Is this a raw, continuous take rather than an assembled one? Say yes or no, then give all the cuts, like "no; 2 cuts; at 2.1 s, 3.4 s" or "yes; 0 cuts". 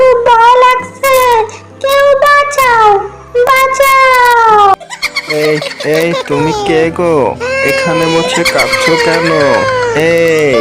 no; 1 cut; at 4.7 s